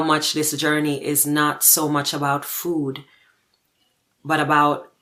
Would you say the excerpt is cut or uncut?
uncut